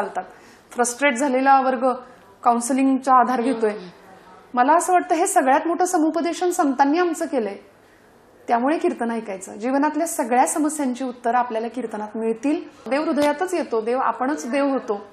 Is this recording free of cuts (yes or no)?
no